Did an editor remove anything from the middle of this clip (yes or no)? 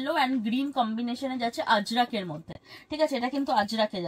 no